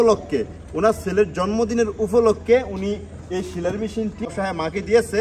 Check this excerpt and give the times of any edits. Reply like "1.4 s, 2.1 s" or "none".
4.3 s